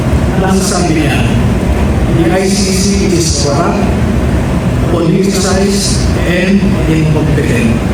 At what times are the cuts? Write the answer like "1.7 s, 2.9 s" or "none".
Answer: none